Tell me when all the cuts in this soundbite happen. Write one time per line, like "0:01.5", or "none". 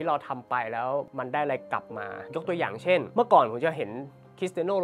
0:01.1
0:02.2
0:03.1